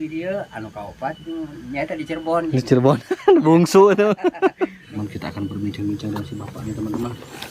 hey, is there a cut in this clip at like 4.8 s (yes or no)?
yes